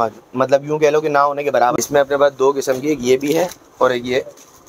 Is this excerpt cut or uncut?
cut